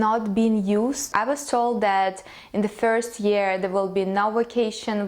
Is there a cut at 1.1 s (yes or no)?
yes